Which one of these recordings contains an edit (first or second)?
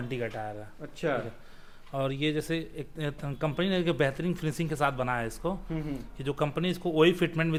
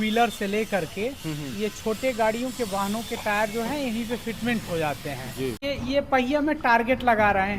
second